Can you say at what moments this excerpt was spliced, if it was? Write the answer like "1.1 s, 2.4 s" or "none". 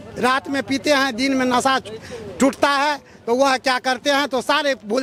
none